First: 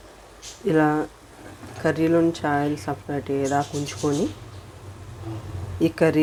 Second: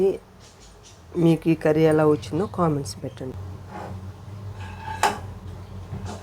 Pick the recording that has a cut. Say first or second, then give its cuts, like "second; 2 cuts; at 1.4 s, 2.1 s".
second; 1 cut; at 3.3 s